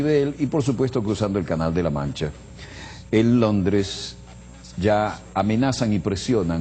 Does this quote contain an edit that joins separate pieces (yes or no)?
yes